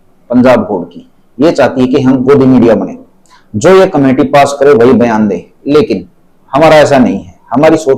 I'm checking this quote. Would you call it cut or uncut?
uncut